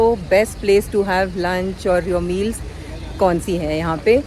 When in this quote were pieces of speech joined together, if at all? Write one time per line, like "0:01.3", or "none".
none